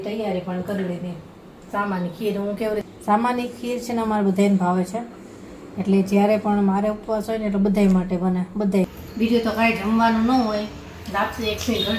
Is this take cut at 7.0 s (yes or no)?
no